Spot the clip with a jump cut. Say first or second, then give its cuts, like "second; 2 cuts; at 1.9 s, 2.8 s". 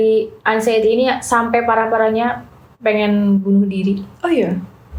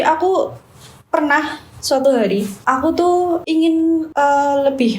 second; 2 cuts; at 2.5 s, 4.0 s